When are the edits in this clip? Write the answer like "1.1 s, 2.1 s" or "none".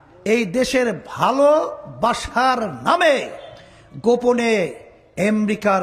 none

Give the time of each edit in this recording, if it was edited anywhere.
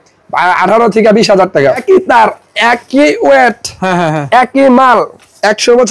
1.8 s

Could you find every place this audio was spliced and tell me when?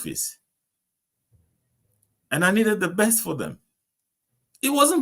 none

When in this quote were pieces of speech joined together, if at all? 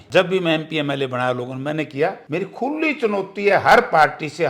2.2 s

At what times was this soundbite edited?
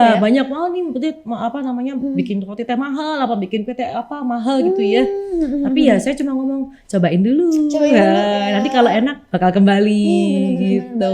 none

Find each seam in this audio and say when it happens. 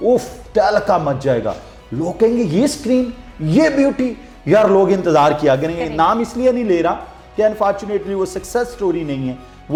none

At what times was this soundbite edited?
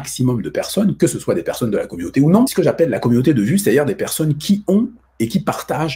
2.5 s

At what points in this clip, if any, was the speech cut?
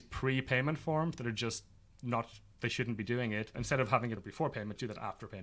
3.6 s, 4.3 s

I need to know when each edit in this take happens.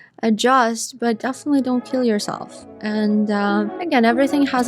3.8 s

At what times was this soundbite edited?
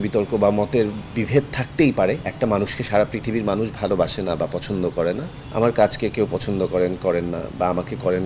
2.3 s, 5.4 s

